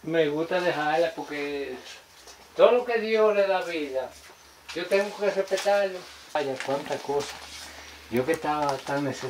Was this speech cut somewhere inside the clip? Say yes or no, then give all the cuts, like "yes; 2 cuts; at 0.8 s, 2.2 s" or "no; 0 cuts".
yes; 1 cut; at 6.4 s